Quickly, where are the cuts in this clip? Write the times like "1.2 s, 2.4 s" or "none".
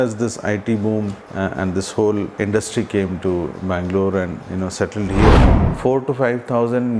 1.2 s, 2.3 s, 5.6 s